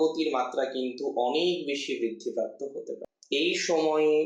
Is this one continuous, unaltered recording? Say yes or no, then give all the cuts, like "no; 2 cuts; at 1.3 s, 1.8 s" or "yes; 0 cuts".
no; 1 cut; at 3.1 s